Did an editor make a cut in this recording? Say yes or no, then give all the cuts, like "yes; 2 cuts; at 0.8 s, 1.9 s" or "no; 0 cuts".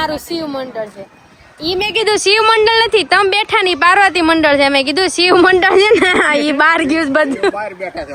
no; 0 cuts